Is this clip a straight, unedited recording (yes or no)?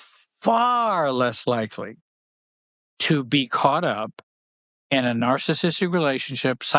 yes